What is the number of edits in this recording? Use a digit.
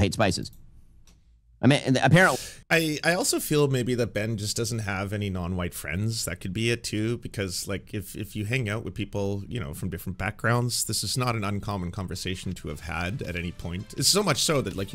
1